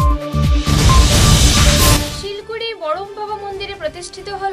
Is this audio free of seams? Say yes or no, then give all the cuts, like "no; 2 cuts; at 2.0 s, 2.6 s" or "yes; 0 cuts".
no; 1 cut; at 2.1 s